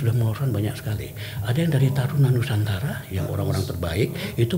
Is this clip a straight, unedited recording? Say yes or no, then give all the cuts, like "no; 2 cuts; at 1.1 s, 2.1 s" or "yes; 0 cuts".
yes; 0 cuts